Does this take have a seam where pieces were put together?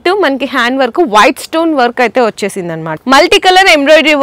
yes; 1 cut; at 2.9 s

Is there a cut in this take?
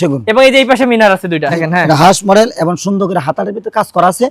yes; 1 cut; at 1.6 s

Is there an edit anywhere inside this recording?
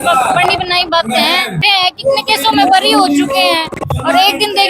yes; 1 cut; at 1.6 s

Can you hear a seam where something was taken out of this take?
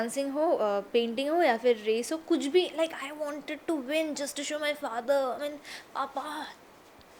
no; 0 cuts

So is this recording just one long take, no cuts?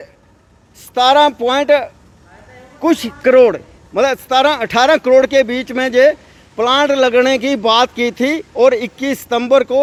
yes; 0 cuts

